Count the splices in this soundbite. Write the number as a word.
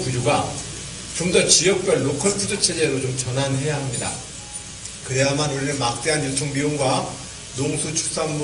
one